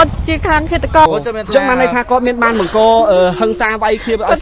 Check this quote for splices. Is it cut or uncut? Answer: cut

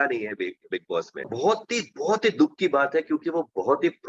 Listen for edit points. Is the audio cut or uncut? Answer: cut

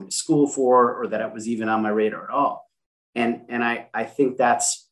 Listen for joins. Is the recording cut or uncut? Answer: uncut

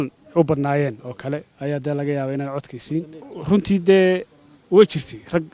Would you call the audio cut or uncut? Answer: cut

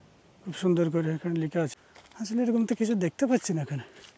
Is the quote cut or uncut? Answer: cut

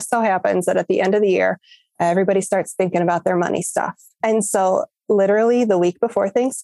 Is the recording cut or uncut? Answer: cut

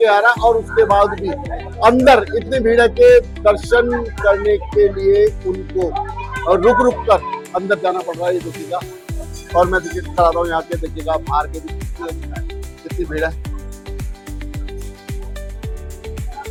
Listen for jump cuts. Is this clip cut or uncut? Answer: uncut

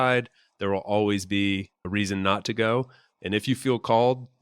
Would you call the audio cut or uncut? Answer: cut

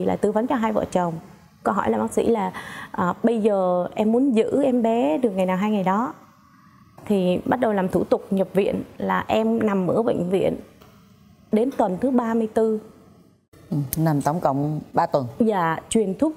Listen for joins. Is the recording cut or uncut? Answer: uncut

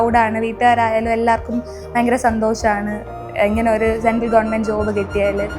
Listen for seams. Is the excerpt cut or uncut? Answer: uncut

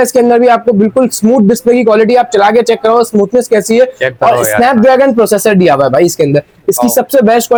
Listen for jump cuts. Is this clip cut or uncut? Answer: uncut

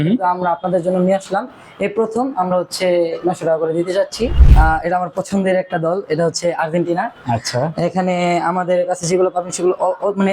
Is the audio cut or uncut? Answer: cut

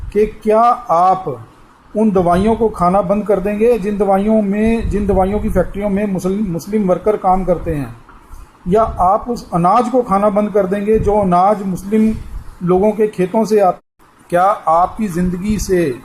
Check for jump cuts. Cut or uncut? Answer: cut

